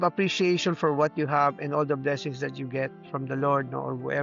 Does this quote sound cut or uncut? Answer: uncut